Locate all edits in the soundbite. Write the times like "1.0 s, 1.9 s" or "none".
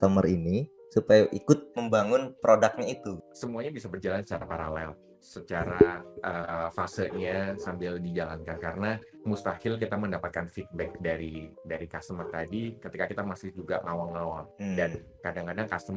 3.3 s, 6.1 s, 9.1 s, 11.5 s, 14.5 s

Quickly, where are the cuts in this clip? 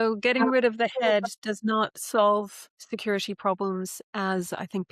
none

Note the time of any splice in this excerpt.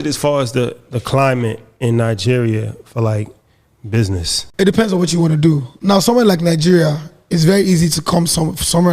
4.4 s, 5.7 s

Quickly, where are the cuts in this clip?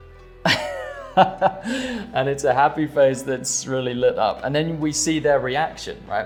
none

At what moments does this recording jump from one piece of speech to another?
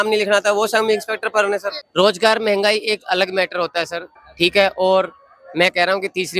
1.8 s, 4.1 s

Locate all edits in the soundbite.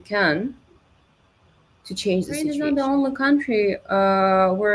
2.5 s

